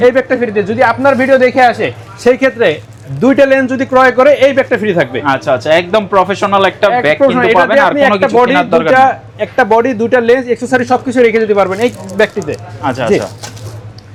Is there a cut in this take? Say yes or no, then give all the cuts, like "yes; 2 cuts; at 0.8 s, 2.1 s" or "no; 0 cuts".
no; 0 cuts